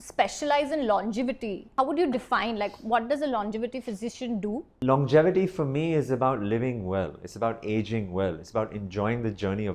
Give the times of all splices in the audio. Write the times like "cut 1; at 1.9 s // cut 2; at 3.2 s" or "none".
cut 1; at 1.6 s // cut 2; at 4.7 s